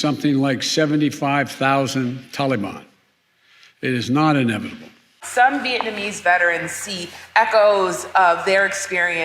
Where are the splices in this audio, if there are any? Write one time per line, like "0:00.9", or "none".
0:05.2